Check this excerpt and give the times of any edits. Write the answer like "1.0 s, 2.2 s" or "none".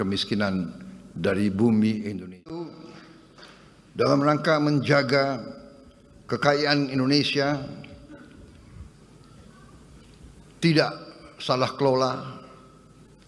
2.6 s